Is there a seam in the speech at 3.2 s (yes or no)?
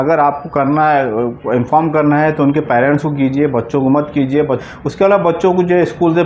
no